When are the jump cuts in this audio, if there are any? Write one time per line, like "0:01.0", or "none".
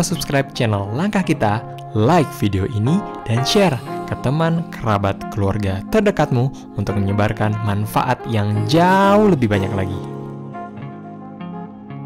none